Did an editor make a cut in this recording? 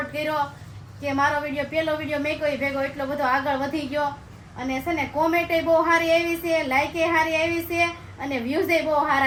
no; 0 cuts

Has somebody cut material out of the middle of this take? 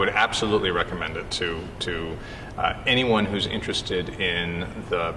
no; 0 cuts

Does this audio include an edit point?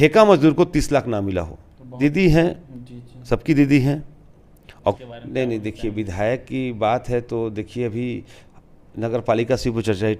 yes; 2 cuts; at 1.9 s, 5.0 s

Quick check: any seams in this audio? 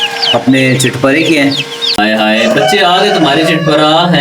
yes; 1 cut; at 1.9 s

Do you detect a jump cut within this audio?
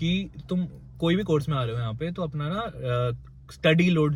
no; 0 cuts

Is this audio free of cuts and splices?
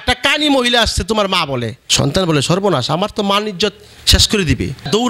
no; 1 cut; at 1.8 s

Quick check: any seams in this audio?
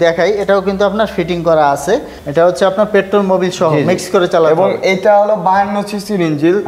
yes; 1 cut; at 2.2 s

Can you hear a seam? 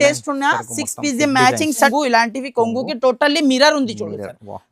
yes; 1 cut; at 1.9 s

